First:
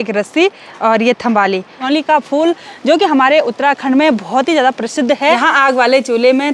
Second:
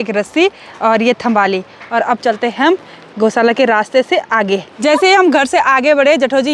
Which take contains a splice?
first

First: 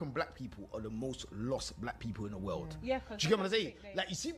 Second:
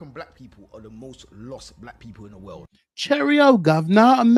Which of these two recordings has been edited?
first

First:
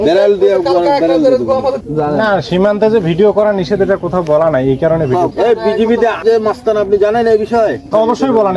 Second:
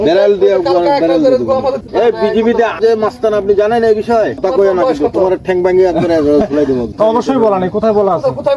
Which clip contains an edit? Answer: second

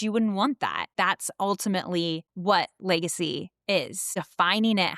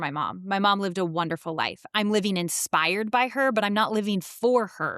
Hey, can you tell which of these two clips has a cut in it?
first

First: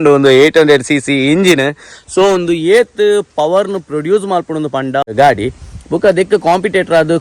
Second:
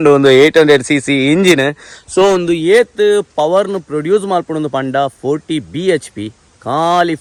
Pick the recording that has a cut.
first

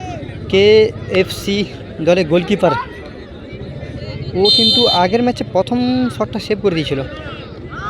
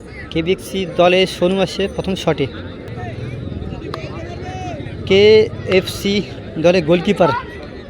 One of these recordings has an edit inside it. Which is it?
second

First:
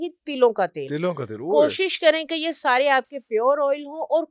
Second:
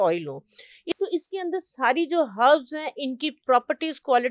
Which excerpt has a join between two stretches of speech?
second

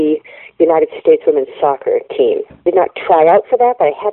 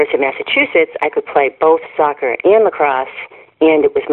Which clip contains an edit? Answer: first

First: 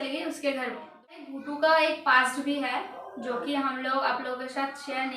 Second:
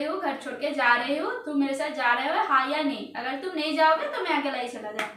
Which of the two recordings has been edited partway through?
first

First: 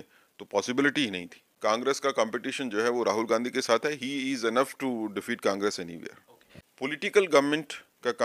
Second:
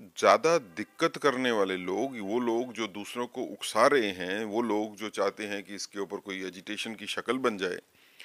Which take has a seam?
first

